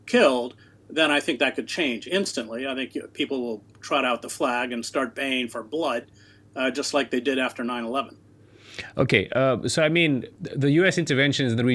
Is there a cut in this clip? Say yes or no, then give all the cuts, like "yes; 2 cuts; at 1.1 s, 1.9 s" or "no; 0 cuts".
no; 0 cuts